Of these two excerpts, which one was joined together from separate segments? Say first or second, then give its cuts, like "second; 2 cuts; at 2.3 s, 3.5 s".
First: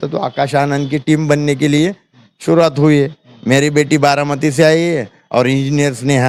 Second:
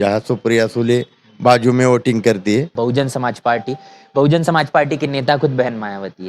second; 1 cut; at 2.7 s